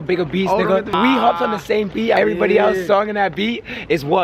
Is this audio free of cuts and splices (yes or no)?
no